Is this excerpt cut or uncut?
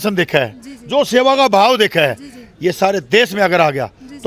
uncut